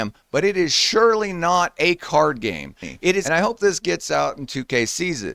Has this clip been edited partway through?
yes; 1 cut; at 3.2 s

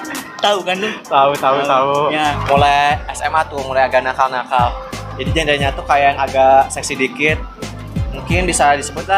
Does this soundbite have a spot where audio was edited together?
yes; 1 cut; at 2.4 s

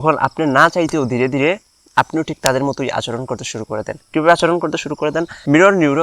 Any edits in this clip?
no; 0 cuts

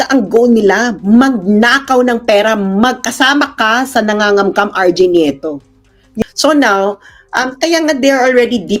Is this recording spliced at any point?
yes; 1 cut; at 6.1 s

